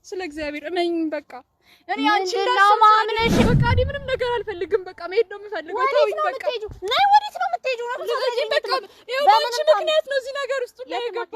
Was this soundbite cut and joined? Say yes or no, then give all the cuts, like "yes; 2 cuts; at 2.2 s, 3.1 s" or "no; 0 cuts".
yes; 1 cut; at 3.4 s